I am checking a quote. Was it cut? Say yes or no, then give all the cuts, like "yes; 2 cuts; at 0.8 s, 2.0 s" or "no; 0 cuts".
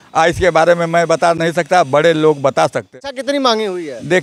yes; 1 cut; at 3.0 s